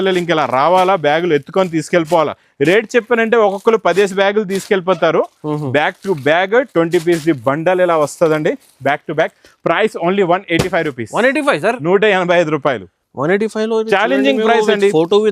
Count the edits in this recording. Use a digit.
0